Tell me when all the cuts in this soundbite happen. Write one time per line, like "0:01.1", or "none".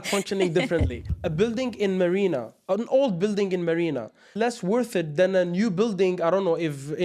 0:01.2
0:04.2